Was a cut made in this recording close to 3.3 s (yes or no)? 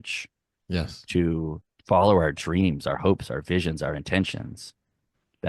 no